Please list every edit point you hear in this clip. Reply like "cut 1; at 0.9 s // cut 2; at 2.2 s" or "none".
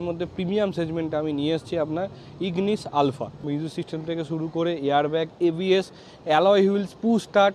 cut 1; at 3.4 s